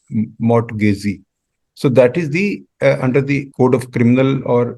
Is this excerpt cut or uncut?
cut